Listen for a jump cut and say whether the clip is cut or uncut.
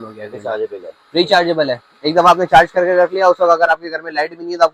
uncut